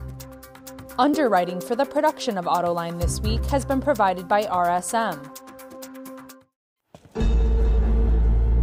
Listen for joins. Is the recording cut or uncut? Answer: cut